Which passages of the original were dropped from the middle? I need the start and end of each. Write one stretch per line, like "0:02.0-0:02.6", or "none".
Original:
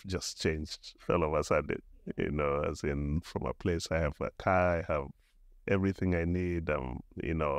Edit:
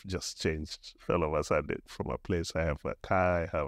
0:01.9-0:03.3